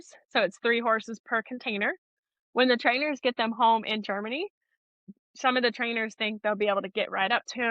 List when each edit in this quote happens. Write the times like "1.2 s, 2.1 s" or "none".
2.2 s, 5.0 s